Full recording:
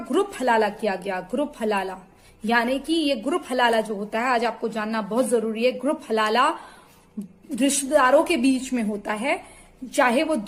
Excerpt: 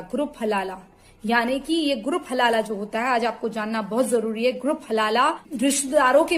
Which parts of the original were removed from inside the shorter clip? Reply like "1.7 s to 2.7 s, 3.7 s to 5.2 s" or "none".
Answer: 6.6 s to 7.4 s